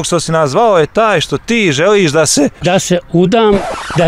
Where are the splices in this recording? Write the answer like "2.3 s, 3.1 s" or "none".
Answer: 2.6 s